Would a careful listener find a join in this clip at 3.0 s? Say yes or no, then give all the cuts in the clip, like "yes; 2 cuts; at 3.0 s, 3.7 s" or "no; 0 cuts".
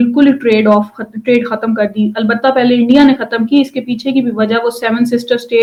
no; 0 cuts